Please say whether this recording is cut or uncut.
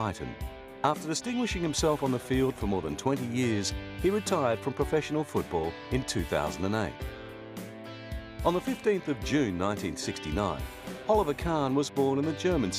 cut